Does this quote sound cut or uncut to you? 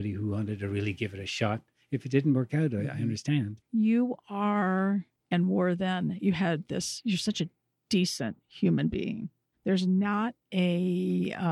cut